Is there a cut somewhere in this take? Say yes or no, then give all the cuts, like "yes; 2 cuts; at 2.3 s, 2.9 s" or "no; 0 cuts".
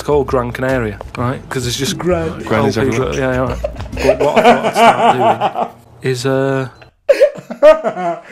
no; 0 cuts